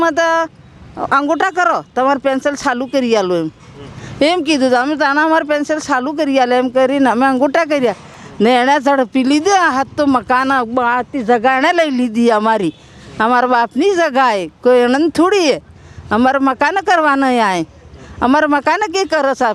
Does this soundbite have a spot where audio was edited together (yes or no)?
no